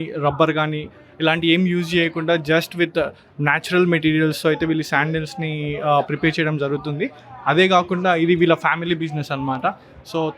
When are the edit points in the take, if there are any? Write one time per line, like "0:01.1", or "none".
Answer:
none